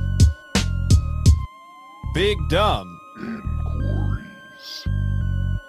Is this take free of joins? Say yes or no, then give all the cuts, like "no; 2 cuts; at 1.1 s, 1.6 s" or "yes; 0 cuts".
no; 1 cut; at 1.0 s